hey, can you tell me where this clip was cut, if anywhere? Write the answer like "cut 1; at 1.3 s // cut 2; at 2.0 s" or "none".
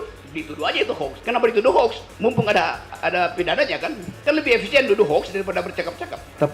cut 1; at 1.2 s // cut 2; at 2.9 s // cut 3; at 4.1 s